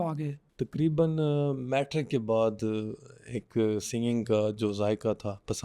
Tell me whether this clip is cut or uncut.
uncut